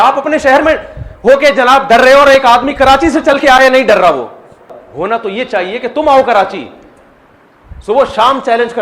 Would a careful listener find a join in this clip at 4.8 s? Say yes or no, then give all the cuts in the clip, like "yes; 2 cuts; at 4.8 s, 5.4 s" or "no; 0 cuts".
yes; 1 cut; at 4.8 s